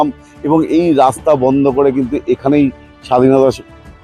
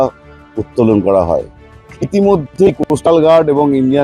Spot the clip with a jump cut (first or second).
second